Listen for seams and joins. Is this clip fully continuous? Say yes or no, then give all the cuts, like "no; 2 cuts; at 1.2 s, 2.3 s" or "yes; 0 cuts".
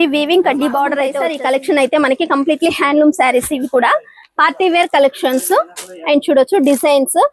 no; 1 cut; at 1.1 s